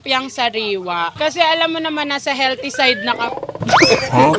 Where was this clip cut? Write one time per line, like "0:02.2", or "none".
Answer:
none